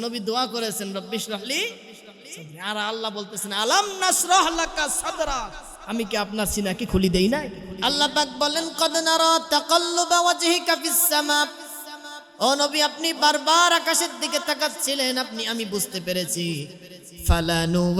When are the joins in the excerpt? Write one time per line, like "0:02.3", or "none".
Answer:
0:07.8

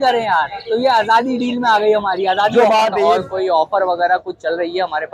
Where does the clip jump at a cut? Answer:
0:03.0

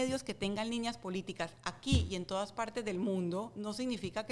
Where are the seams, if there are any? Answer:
none

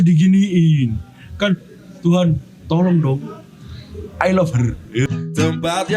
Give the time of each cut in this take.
0:05.1

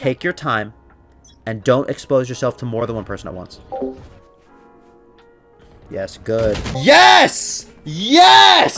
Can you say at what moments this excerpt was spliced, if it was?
0:02.8
0:06.8

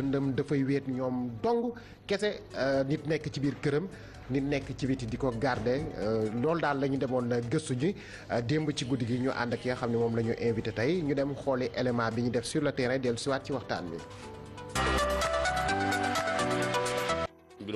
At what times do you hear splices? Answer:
0:14.9

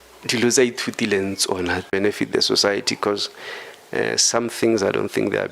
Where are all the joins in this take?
0:01.9

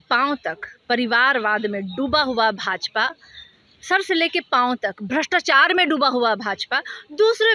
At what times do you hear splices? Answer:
none

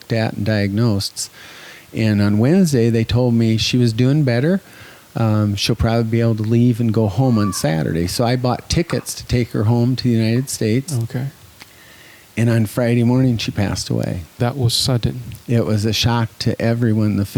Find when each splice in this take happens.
none

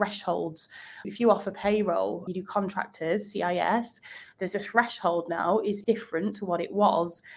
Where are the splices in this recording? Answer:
0:01.1
0:02.3
0:05.8

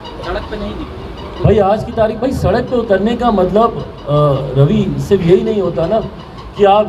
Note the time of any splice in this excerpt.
none

